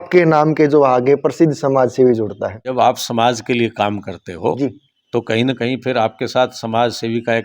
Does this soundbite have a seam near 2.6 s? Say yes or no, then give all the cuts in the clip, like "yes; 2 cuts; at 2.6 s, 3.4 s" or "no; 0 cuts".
yes; 1 cut; at 2.6 s